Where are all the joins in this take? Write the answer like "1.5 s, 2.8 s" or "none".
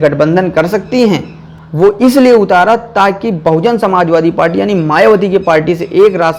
1.4 s